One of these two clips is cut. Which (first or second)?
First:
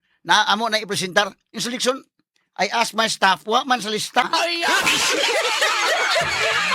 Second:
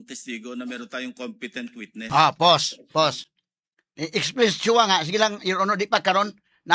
first